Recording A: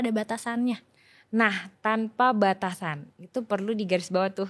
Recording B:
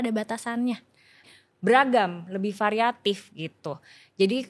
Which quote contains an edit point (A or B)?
B